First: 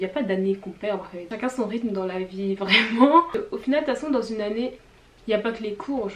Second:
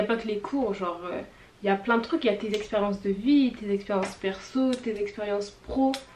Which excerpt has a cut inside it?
first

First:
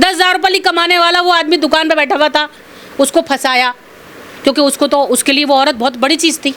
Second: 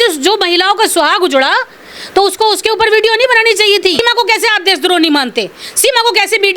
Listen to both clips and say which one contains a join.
second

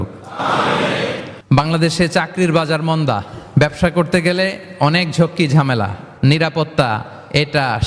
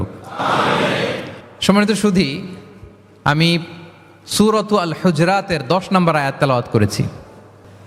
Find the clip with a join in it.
first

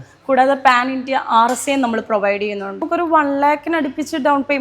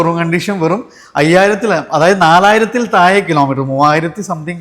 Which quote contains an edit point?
first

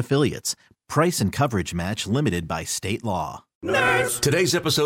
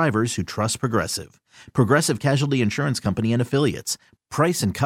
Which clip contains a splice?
first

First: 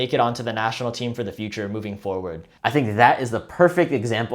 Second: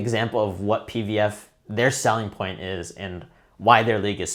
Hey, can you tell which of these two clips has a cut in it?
first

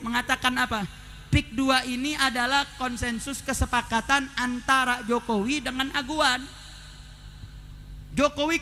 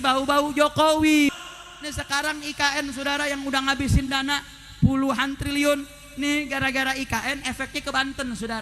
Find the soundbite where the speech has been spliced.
second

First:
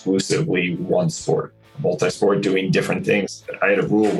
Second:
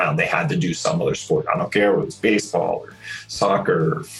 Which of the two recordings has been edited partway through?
first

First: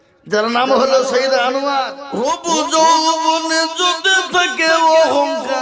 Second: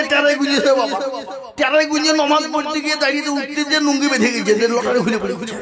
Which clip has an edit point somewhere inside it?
first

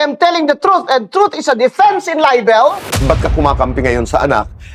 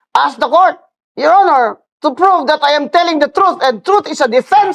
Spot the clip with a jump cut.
first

